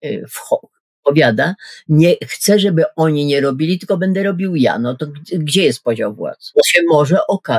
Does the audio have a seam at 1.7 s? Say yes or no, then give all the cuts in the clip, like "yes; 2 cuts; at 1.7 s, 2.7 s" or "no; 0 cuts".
no; 1 cut; at 6.3 s